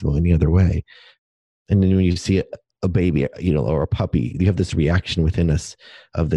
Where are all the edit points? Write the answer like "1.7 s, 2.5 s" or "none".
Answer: 1.1 s, 2.6 s